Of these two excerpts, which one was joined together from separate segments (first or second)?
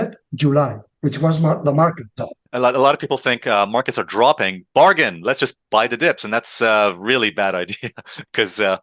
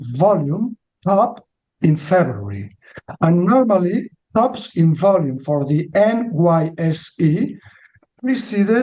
first